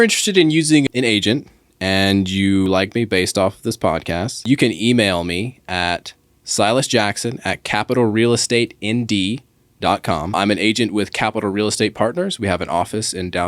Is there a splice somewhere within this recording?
yes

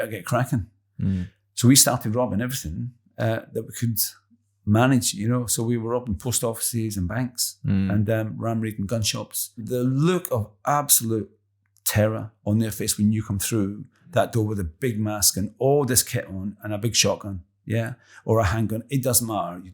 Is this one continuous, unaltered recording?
no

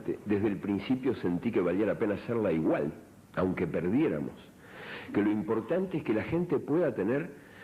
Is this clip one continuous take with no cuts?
yes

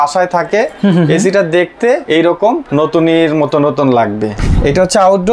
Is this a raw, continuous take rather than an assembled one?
no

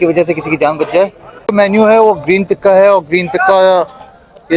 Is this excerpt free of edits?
no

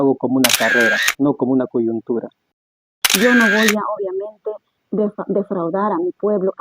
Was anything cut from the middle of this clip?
yes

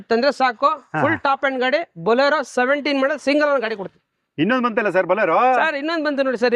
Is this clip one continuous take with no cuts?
yes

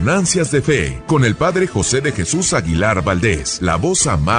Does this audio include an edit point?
yes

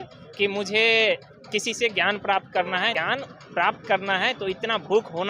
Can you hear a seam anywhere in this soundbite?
yes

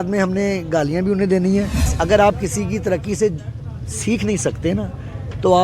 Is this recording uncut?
no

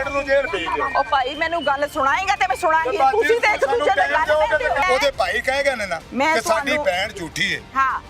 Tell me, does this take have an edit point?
yes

